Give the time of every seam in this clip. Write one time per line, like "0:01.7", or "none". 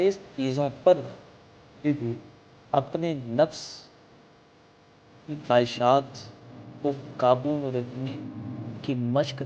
none